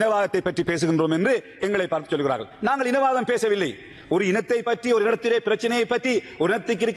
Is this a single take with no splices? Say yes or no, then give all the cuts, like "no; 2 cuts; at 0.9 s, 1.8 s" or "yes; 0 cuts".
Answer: yes; 0 cuts